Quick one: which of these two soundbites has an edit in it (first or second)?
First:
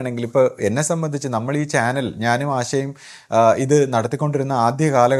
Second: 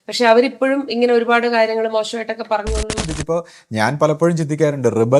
second